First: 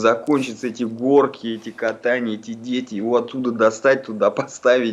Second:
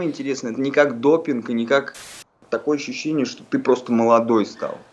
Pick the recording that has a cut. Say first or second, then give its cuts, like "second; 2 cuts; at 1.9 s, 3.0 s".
second; 1 cut; at 2.4 s